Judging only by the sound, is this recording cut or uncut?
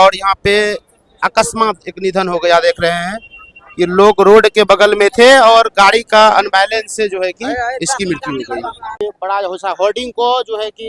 cut